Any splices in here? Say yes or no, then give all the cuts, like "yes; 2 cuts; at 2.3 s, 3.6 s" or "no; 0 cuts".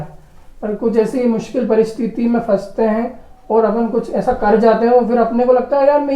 no; 0 cuts